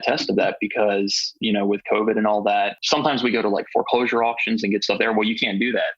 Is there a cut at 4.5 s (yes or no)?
no